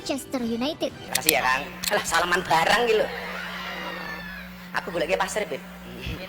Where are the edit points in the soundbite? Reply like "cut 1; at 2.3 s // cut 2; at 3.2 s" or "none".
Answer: cut 1; at 1.0 s